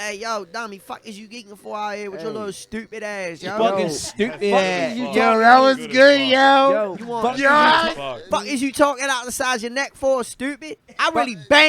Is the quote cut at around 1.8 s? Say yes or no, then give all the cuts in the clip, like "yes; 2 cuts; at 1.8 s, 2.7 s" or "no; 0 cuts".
no; 1 cut; at 8.3 s